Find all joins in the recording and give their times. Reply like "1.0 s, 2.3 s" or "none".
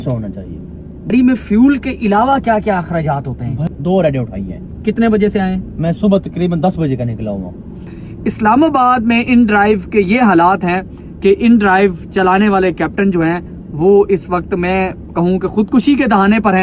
1.1 s, 3.6 s, 7.8 s